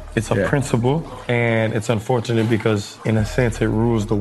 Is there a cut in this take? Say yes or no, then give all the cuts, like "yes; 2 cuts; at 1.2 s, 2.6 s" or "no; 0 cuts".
yes; 2 cuts; at 1.1 s, 2.9 s